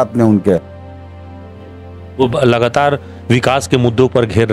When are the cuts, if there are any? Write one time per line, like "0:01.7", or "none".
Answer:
none